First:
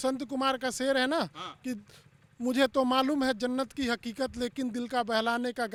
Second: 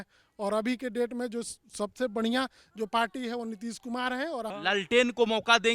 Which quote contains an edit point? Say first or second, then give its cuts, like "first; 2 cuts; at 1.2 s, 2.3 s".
second; 1 cut; at 4.5 s